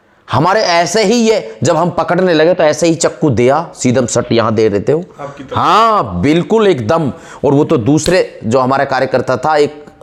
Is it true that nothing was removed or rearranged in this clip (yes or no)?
yes